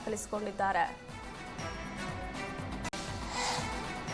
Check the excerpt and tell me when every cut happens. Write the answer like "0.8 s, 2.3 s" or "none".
2.9 s